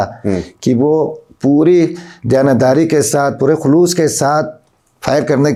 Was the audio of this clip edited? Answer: no; 0 cuts

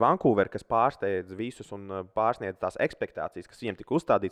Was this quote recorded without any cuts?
yes; 0 cuts

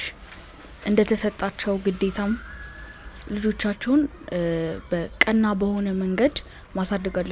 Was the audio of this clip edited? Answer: no; 0 cuts

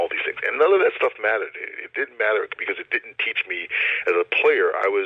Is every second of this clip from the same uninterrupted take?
yes; 0 cuts

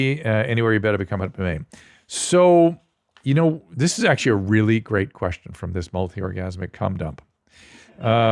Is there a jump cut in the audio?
no; 0 cuts

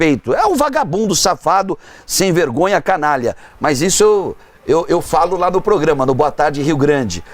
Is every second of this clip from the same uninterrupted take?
yes; 0 cuts

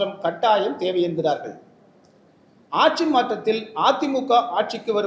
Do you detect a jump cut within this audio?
no; 0 cuts

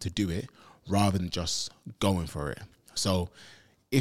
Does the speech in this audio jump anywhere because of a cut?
no; 0 cuts

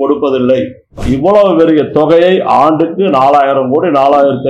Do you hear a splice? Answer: yes; 1 cut; at 1.0 s

